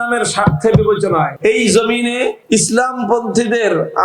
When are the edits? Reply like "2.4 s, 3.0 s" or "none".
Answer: 1.3 s, 2.4 s